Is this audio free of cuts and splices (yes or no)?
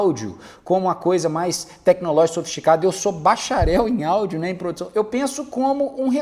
yes